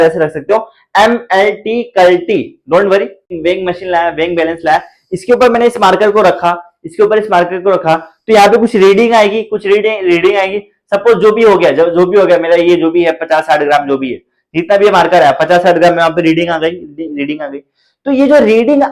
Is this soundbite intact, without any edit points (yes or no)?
no